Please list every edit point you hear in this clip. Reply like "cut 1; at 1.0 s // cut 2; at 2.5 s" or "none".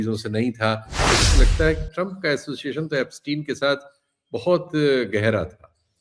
cut 1; at 1.2 s